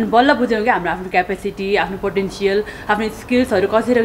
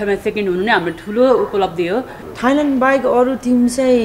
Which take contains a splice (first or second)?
second